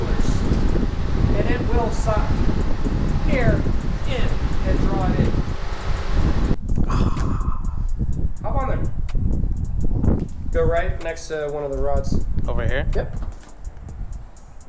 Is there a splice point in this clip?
yes; 1 cut; at 6.6 s

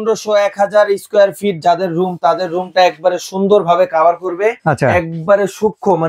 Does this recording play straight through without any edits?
yes; 0 cuts

